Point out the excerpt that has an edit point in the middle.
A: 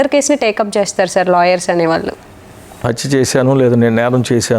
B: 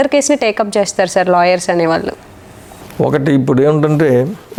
A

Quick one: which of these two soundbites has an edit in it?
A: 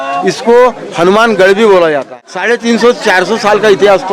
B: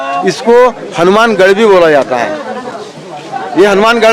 A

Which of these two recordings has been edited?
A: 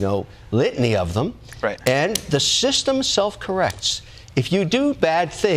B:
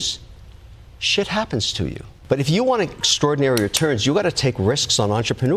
B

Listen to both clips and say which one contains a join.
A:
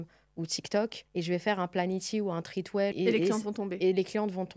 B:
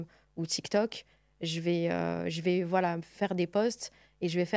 A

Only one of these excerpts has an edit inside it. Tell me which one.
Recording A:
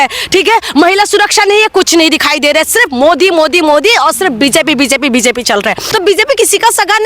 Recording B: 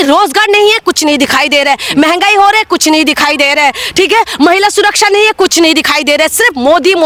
A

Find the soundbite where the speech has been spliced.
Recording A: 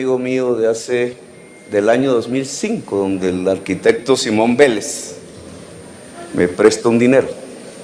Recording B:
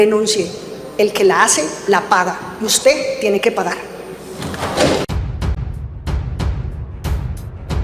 B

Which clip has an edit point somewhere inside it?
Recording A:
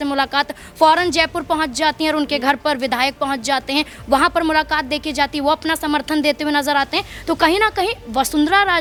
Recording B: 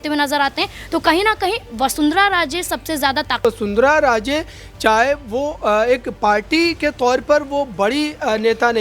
B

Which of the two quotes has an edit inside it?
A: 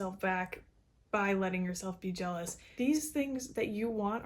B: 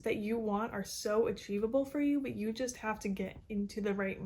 A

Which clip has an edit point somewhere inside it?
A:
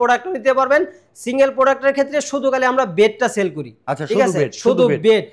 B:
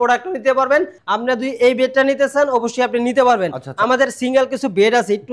B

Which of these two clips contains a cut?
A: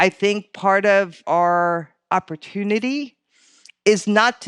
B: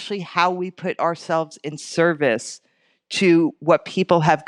A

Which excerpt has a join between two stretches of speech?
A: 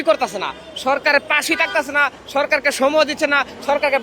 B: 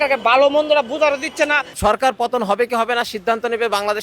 B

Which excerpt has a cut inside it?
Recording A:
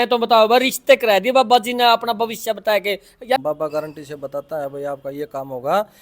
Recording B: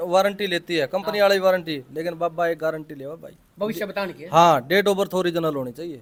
A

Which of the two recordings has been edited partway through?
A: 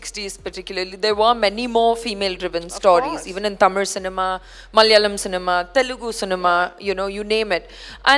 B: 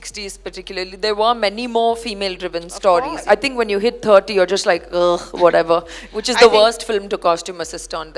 B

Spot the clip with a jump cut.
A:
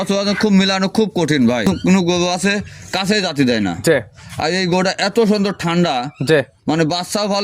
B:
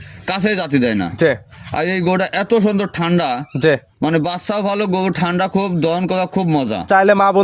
A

